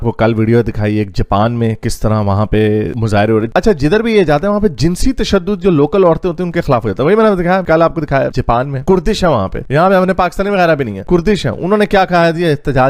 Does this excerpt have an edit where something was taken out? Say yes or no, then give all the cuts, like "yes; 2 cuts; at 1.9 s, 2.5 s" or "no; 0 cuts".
no; 0 cuts